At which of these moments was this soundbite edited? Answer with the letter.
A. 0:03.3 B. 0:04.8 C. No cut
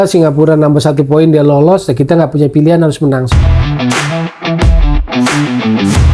A